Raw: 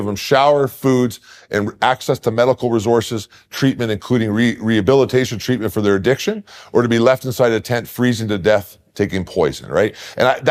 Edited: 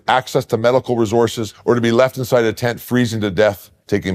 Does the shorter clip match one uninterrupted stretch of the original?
no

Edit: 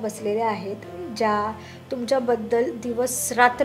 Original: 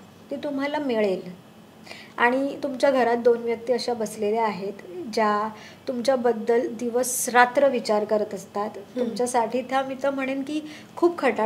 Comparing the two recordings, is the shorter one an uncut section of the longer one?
yes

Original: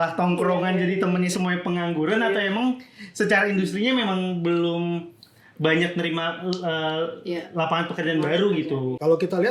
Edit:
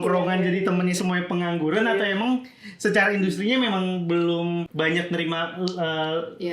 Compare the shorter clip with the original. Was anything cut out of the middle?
yes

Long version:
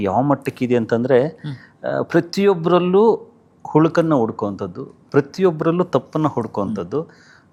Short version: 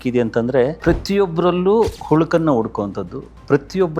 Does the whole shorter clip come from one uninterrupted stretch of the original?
no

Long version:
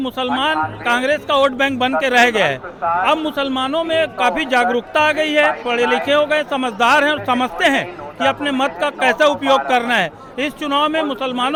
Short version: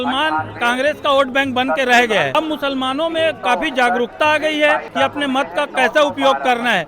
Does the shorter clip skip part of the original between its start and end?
yes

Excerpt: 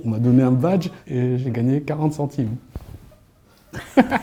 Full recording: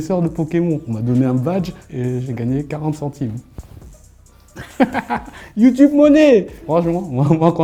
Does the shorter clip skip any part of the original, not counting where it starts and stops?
no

